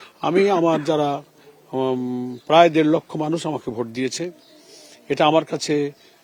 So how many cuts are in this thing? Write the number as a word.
zero